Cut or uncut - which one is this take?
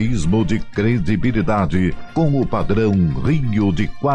uncut